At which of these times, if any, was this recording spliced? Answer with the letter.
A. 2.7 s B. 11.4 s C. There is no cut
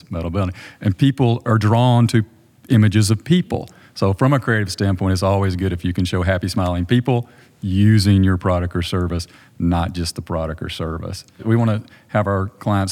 B